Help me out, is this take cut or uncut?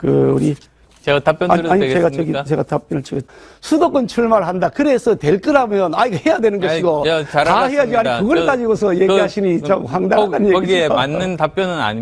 cut